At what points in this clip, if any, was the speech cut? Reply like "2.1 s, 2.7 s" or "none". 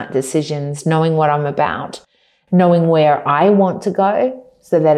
none